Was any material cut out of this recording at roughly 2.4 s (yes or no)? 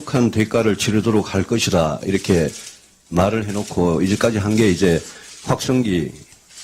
no